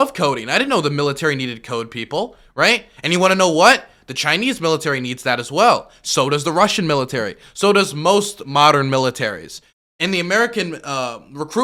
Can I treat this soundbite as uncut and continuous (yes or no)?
yes